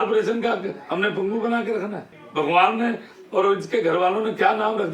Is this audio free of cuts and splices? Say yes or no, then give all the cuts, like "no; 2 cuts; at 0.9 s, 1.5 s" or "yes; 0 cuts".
yes; 0 cuts